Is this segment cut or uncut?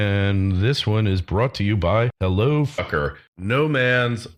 uncut